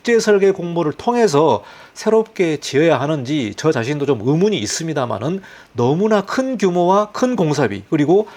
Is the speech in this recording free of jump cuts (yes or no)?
yes